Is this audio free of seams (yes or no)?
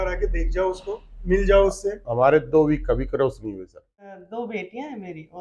no